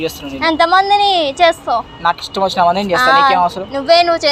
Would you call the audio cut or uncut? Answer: cut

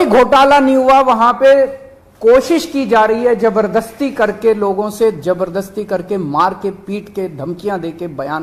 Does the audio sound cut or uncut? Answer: uncut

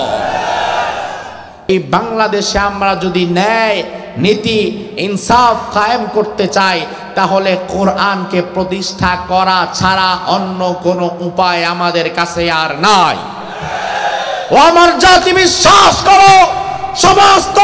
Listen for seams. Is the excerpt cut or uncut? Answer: cut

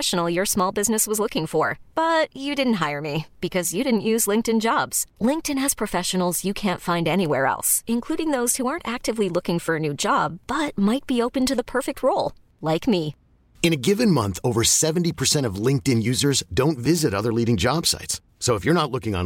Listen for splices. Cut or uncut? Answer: uncut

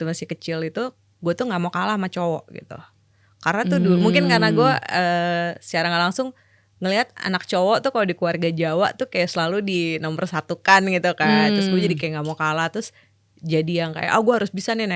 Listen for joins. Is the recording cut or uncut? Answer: uncut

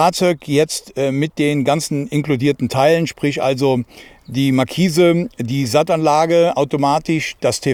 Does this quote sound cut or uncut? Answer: uncut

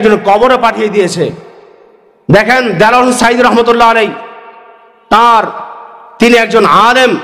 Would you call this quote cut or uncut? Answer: uncut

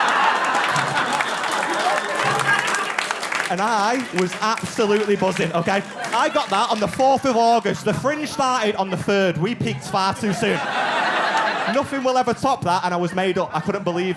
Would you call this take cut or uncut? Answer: cut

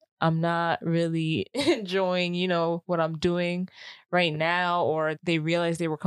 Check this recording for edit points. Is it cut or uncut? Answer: cut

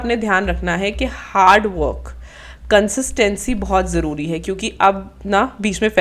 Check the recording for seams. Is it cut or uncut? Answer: uncut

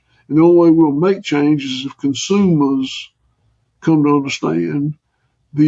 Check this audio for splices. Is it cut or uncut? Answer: uncut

